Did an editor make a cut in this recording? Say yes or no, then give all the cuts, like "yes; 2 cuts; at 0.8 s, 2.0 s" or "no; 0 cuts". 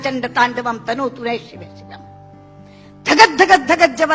yes; 2 cuts; at 1.6 s, 2.8 s